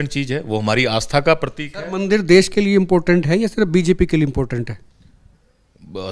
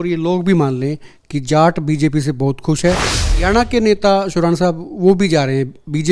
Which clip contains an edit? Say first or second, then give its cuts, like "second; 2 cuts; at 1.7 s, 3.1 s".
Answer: second; 1 cut; at 3.0 s